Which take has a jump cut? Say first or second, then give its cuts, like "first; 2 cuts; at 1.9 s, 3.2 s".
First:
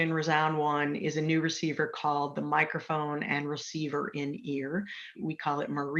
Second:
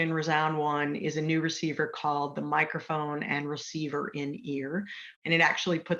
second; 1 cut; at 5.1 s